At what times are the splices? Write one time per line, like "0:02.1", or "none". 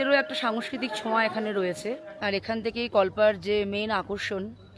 0:02.1

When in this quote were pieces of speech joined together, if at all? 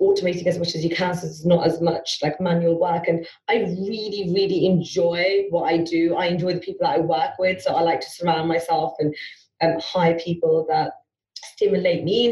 none

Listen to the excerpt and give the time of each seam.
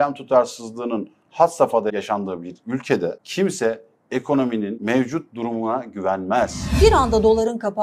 0:01.9
0:03.2
0:04.8
0:06.7

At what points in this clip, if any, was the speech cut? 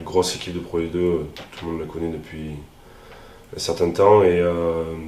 none

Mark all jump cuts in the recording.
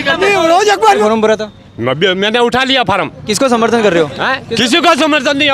0:01.0

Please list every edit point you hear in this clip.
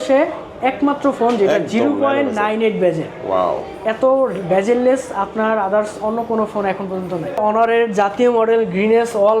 0:07.4

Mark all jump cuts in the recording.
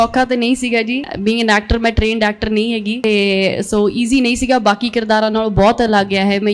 0:01.1
0:03.0

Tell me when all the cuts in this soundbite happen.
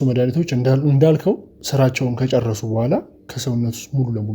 0:01.5
0:03.2

